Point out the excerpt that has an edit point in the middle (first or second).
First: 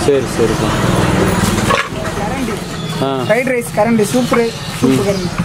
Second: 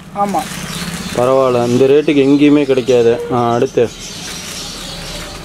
first